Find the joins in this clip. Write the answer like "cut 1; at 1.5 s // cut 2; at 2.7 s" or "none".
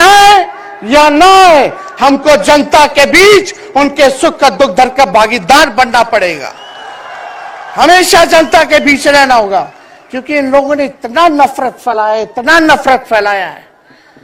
none